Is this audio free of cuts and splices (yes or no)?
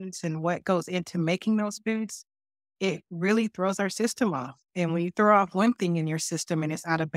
yes